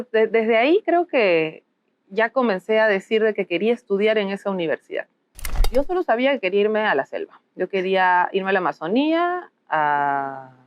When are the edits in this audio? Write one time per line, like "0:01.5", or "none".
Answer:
0:05.7